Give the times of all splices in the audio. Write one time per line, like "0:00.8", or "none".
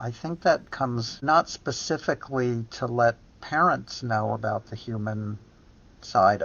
0:01.2